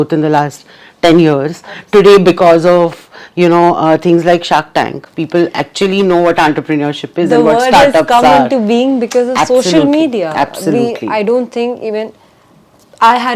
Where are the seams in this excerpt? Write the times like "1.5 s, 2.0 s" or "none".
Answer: none

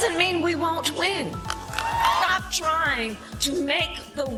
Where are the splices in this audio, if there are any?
none

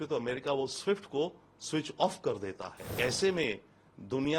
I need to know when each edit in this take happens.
2.9 s

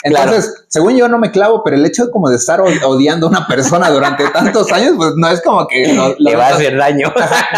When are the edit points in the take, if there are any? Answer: none

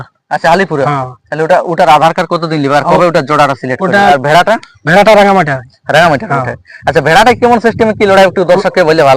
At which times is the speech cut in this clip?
4.1 s

